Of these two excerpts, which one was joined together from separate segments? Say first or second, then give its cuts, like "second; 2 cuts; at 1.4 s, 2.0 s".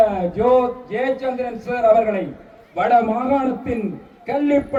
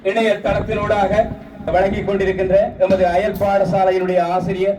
second; 1 cut; at 1.7 s